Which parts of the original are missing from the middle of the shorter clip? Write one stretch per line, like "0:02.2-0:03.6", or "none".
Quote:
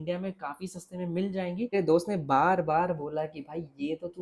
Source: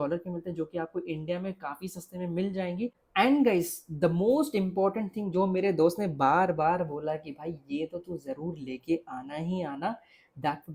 0:02.9-0:05.6